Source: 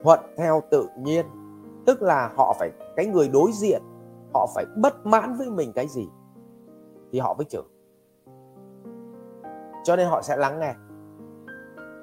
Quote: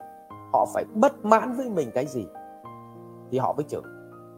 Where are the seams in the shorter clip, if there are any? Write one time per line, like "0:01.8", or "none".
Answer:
none